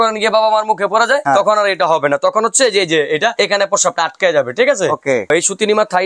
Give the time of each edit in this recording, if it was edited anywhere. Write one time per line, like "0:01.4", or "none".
0:01.2
0:03.3
0:05.3